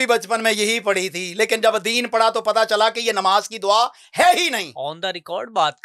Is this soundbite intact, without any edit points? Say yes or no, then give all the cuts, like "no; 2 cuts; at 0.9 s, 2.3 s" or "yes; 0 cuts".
yes; 0 cuts